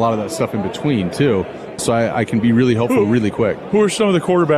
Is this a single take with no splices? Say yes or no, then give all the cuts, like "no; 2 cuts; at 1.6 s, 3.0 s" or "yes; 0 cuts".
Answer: no; 1 cut; at 1.8 s